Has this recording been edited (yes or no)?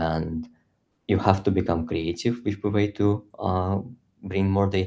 no